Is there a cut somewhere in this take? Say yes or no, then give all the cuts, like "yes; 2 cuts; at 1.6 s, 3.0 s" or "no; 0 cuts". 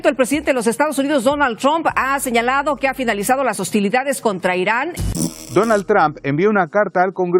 no; 0 cuts